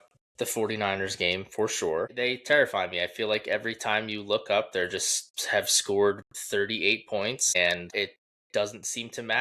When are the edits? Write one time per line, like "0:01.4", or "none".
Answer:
0:02.1
0:07.8